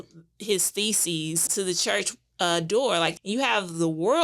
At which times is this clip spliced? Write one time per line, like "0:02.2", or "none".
0:01.4
0:03.1